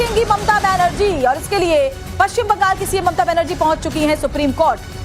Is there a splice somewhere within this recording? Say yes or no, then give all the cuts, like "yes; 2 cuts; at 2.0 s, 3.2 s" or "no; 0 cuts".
yes; 1 cut; at 3.7 s